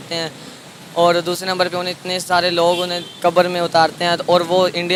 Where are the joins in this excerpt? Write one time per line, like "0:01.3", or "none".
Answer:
none

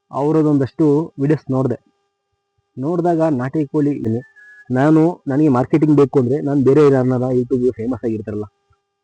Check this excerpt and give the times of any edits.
0:04.0

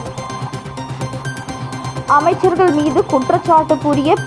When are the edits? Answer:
none

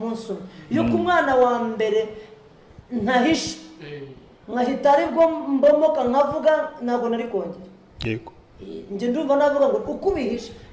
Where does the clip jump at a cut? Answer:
none

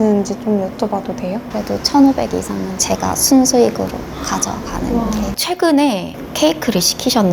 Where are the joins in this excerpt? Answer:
0:01.5
0:02.8
0:05.4
0:06.1

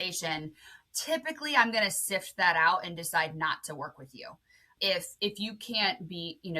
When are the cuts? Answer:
0:04.7

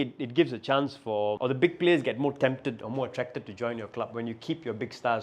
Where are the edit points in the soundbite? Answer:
0:01.4

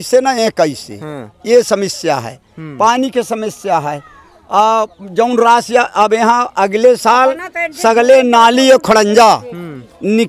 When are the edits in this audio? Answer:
none

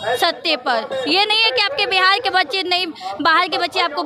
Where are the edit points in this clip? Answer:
none

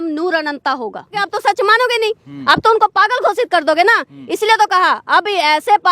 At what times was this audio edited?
0:01.3

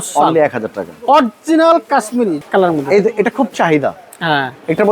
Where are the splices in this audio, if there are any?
0:02.4

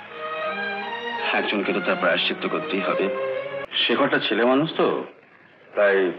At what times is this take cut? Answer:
0:03.6

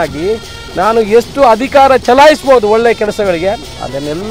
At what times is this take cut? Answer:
none

